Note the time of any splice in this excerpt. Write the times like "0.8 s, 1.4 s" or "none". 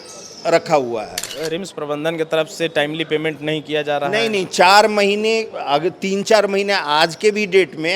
1.3 s